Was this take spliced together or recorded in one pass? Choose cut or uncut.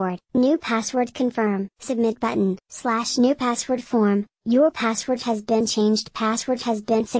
uncut